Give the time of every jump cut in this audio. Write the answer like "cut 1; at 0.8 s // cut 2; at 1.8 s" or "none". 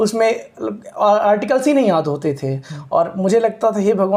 none